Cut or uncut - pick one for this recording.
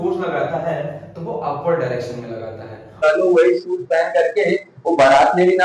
cut